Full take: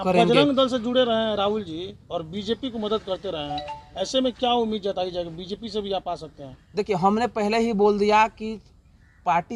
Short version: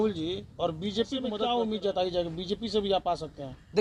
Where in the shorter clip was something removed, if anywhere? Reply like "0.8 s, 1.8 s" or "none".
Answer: 1.3 s